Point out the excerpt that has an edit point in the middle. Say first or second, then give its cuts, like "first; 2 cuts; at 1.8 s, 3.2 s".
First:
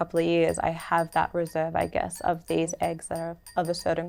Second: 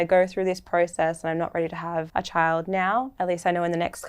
second; 2 cuts; at 2.1 s, 3.1 s